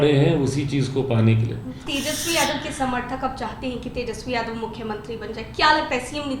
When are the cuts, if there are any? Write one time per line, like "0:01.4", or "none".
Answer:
0:01.8